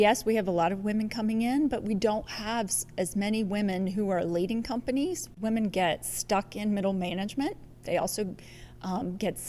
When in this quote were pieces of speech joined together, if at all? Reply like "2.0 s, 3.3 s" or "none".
5.3 s